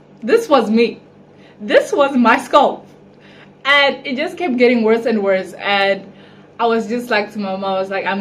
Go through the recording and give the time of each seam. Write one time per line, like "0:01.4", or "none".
none